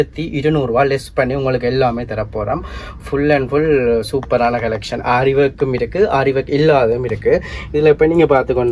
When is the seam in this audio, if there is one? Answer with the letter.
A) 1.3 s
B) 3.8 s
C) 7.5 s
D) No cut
D